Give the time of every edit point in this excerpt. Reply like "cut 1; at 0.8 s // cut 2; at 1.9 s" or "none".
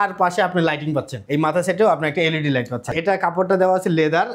cut 1; at 1.1 s // cut 2; at 2.9 s